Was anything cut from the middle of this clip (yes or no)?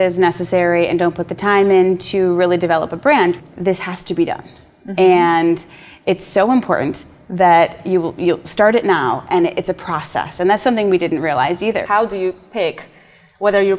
yes